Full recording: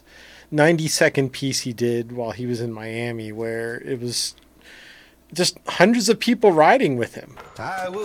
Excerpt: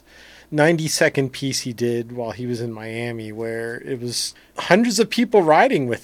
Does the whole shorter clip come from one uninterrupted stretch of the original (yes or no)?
no